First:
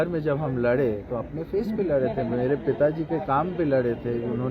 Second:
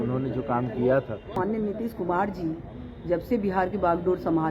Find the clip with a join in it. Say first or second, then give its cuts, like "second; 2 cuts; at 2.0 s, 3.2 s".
second; 1 cut; at 1.4 s